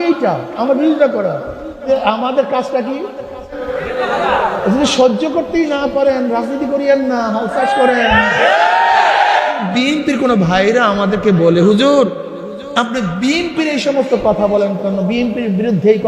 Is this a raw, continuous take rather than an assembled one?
no; 3 cuts; at 1.8 s, 3.6 s, 9.6 s

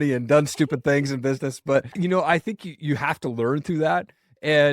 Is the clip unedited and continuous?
no; 1 cut; at 1.9 s

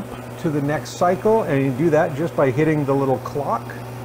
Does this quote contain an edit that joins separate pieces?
no; 0 cuts

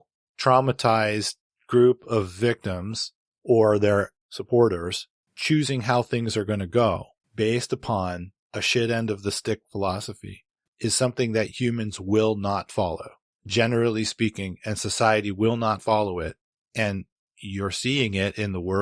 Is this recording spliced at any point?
yes; 1 cut; at 4.2 s

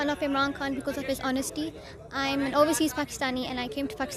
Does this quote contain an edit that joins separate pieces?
no; 0 cuts

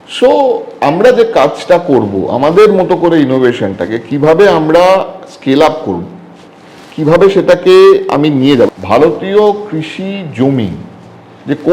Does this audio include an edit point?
yes; 1 cut; at 8.7 s

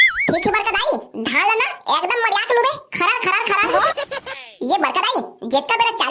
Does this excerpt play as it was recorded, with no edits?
no; 1 cut; at 4.2 s

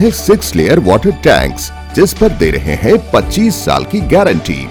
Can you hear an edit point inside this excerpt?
no; 0 cuts

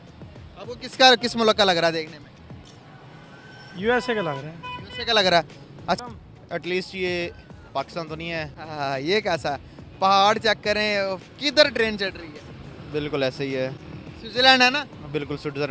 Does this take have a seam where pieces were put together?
yes; 2 cuts; at 6.0 s, 8.6 s

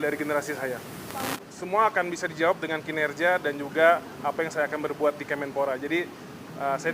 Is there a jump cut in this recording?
yes; 1 cut; at 1.3 s

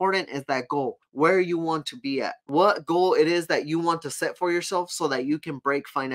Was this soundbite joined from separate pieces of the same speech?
yes; 2 cuts; at 1.0 s, 2.4 s

